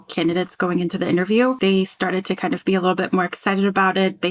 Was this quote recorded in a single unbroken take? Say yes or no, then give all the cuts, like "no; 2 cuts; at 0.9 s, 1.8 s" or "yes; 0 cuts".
no; 1 cut; at 1.6 s